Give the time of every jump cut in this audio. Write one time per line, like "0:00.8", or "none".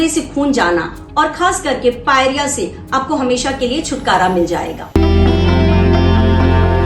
0:04.8